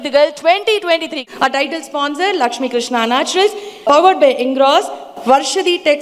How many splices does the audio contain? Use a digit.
1